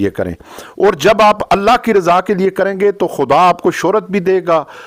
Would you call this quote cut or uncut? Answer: uncut